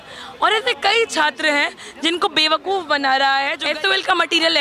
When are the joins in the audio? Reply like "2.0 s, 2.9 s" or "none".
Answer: 3.6 s